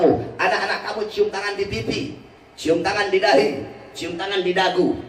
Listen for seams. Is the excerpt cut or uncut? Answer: uncut